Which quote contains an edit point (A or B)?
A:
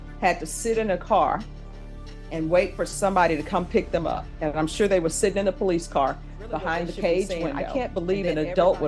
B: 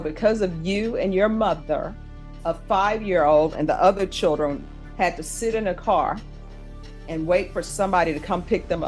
A